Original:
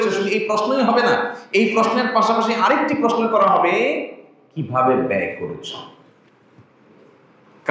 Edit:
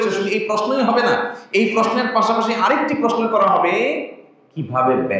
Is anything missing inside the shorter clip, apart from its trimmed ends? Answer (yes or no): no